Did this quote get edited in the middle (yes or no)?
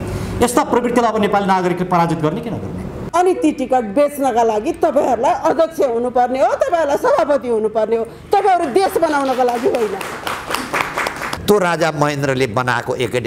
yes